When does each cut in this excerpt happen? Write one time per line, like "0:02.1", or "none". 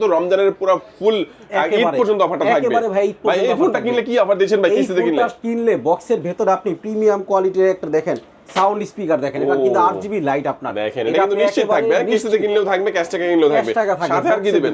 none